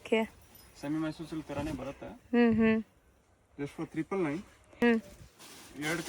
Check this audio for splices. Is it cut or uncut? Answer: cut